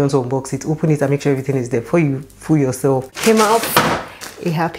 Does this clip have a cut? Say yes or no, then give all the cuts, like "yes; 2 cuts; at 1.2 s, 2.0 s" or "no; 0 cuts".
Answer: yes; 1 cut; at 3.1 s